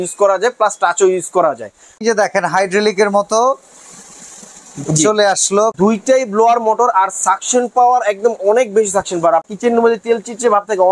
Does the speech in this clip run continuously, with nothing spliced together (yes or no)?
no